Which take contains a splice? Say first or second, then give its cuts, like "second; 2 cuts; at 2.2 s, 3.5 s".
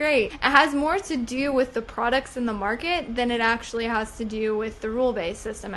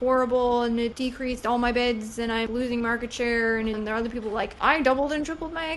second; 3 cuts; at 0.9 s, 2.4 s, 3.8 s